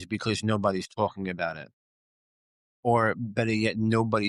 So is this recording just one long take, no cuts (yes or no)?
yes